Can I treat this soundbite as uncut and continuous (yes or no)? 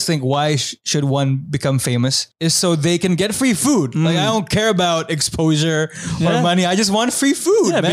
yes